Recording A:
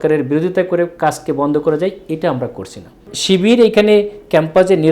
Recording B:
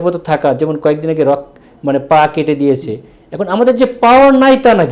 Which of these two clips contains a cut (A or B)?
A